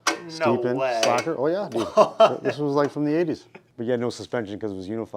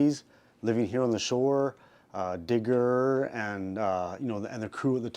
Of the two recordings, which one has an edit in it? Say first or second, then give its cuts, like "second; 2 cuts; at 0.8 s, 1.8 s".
first; 1 cut; at 3.6 s